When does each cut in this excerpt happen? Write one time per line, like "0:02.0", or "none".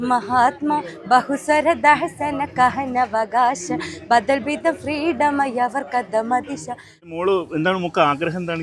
0:07.1